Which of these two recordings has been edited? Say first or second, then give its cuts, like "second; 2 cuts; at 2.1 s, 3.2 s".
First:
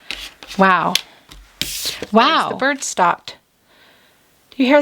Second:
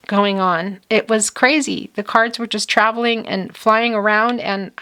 first; 1 cut; at 2.6 s